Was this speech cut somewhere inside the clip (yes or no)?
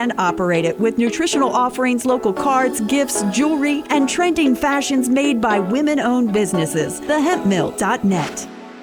no